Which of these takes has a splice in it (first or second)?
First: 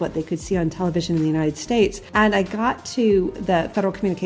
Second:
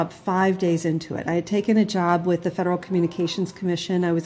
first